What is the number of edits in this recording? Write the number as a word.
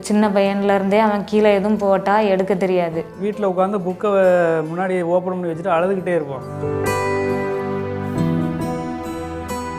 zero